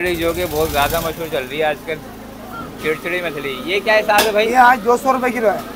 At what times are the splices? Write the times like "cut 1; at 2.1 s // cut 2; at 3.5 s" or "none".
none